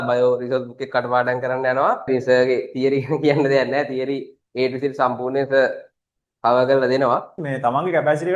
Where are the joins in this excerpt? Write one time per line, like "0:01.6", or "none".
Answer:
0:02.1
0:07.4